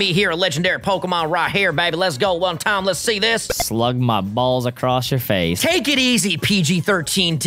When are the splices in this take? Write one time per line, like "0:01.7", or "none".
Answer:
0:03.6
0:05.6